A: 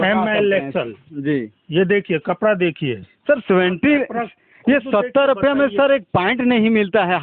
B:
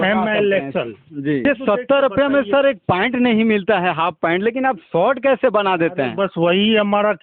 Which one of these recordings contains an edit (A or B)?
B